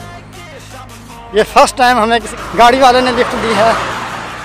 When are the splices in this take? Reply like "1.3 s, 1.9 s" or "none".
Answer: 2.5 s